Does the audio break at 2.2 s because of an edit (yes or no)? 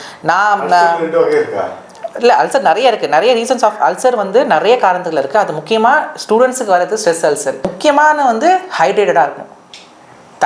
no